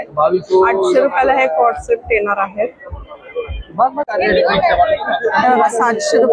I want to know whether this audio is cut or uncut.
cut